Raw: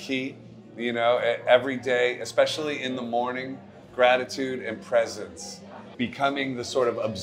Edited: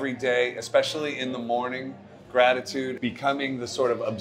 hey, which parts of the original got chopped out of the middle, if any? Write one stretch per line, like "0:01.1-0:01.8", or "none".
0:04.6-0:05.9